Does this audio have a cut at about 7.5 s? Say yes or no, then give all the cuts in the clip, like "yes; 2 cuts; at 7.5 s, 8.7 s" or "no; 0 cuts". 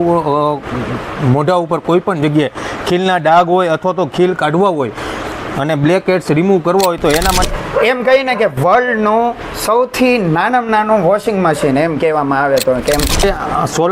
yes; 2 cuts; at 7.5 s, 13.2 s